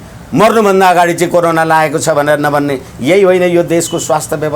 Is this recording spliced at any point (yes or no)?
no